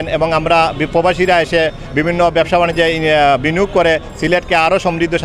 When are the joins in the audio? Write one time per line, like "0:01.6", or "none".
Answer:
none